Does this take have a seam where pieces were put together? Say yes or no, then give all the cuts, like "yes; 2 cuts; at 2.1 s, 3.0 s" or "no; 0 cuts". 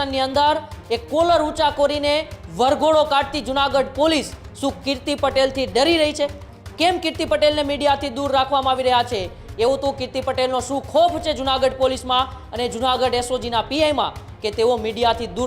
no; 0 cuts